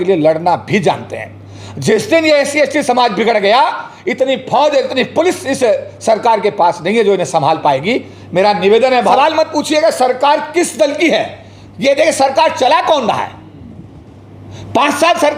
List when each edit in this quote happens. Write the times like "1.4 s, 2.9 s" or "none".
9.1 s